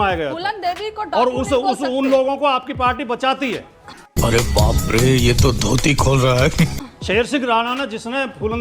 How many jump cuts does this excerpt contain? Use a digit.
2